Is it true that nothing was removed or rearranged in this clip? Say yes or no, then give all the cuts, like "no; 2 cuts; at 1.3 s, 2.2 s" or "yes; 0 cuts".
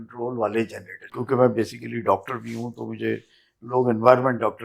no; 1 cut; at 1.1 s